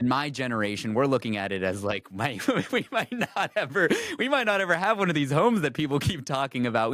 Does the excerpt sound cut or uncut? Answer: uncut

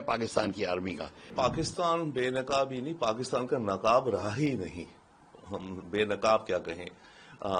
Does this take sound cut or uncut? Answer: cut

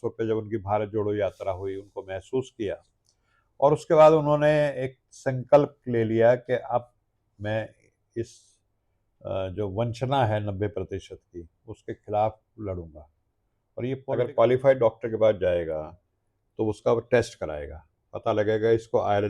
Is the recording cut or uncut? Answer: cut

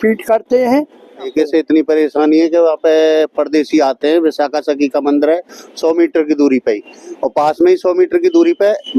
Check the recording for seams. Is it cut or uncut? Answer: cut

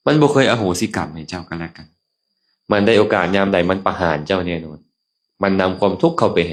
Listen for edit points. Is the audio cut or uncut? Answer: uncut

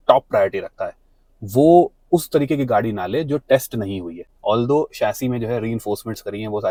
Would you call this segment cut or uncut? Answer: uncut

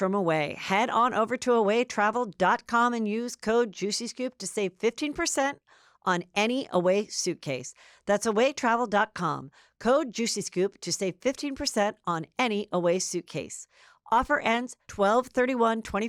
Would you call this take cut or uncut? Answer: uncut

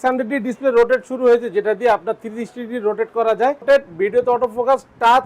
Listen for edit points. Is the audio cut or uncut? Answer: cut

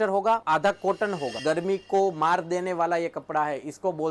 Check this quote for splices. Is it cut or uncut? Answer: cut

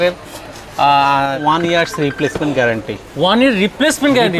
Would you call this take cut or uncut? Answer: cut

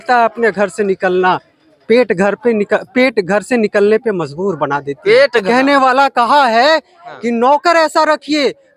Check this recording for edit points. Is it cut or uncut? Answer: cut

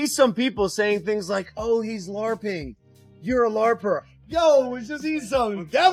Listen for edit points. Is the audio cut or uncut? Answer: uncut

